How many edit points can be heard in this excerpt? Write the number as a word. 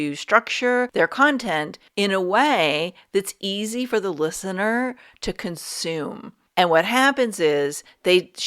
three